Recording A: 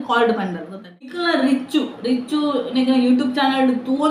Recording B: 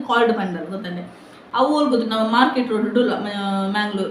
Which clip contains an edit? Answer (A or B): A